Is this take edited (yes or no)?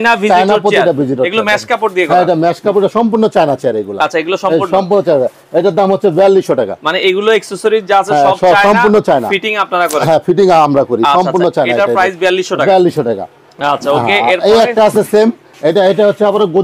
no